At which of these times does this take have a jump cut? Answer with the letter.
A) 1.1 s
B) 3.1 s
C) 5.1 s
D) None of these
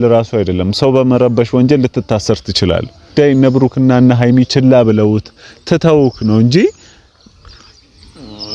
B